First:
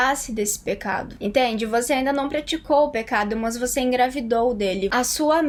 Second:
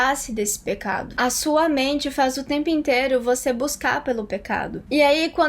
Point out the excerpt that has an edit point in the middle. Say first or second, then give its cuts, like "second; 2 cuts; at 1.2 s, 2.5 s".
second; 1 cut; at 1.2 s